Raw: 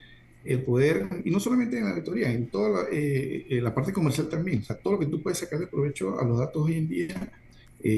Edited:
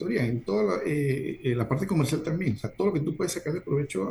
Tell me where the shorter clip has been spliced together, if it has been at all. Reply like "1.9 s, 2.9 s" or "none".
none